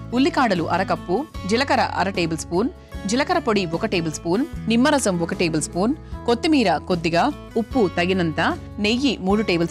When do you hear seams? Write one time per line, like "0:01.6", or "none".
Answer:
0:08.6